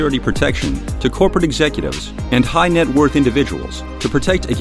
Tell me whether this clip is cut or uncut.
uncut